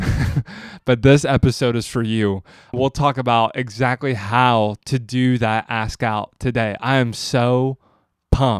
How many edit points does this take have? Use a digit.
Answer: 1